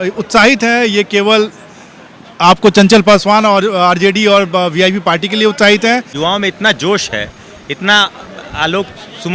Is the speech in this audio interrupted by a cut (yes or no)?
yes